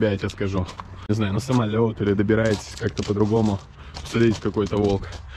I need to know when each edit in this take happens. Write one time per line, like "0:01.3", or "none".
0:01.3